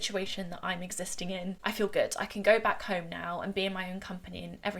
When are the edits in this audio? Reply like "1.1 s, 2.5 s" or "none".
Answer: 1.6 s